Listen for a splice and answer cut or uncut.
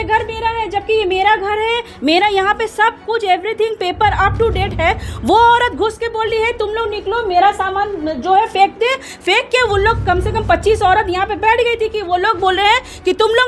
uncut